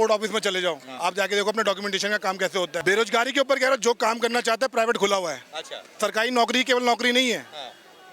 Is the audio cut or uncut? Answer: cut